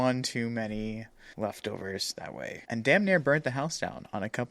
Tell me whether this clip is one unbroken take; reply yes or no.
no